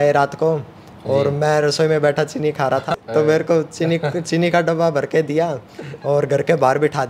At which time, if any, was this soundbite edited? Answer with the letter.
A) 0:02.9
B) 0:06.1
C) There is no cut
A